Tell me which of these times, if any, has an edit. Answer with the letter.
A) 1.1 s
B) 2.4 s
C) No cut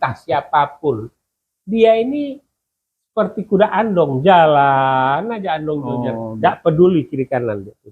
A